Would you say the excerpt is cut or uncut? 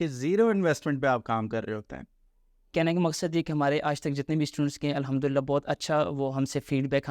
cut